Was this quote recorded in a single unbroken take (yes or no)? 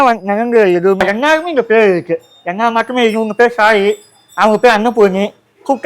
no